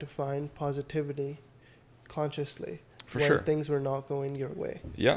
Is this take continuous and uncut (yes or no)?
yes